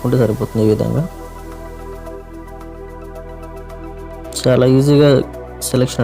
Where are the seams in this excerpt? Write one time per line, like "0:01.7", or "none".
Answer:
0:01.5
0:04.4